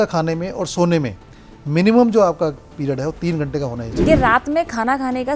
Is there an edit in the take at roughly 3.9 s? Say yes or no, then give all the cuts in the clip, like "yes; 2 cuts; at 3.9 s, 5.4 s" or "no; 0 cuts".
yes; 1 cut; at 3.9 s